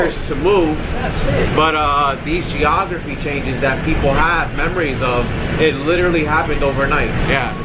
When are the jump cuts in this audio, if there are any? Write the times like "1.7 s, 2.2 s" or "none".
none